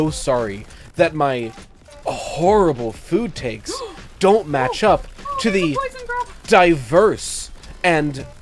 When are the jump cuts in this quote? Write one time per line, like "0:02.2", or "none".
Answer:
none